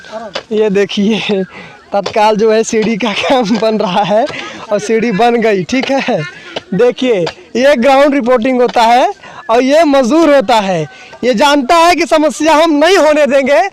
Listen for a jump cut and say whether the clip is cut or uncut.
uncut